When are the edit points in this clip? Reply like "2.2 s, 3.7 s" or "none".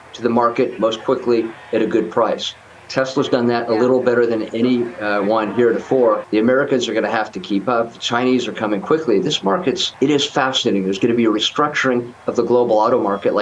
6.2 s, 9.9 s

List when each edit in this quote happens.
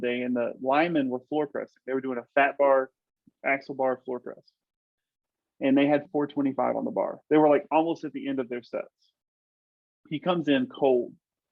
6.1 s

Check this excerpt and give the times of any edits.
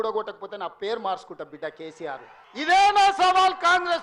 2.4 s

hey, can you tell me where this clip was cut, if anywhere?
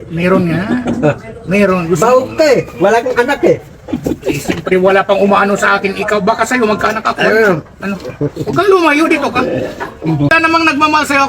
10.3 s

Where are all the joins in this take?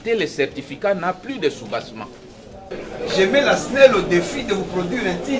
2.7 s

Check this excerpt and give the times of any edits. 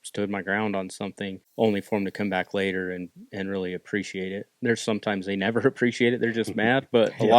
1.4 s

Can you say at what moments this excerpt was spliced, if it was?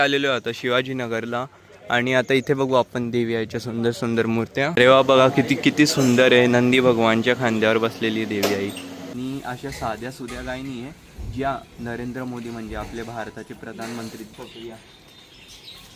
4.7 s, 9.1 s, 14.3 s

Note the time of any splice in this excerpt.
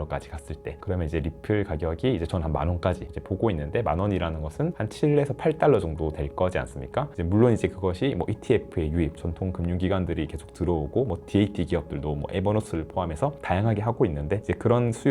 7.1 s

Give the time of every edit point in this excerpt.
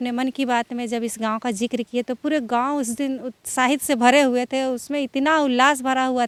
none

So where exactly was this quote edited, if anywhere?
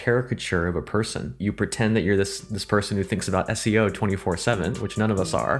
1.4 s

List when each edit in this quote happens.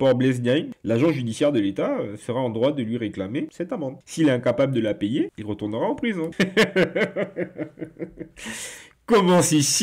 6.3 s

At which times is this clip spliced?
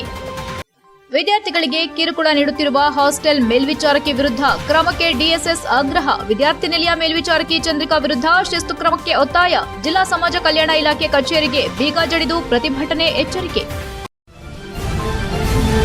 14.0 s

